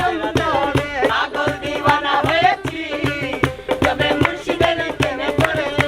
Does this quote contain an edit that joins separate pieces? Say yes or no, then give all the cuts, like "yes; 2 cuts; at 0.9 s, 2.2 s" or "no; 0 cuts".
yes; 1 cut; at 1.1 s